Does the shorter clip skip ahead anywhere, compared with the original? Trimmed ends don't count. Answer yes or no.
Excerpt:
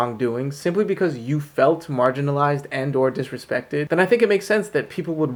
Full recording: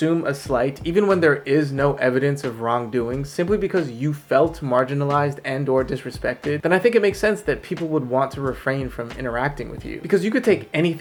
no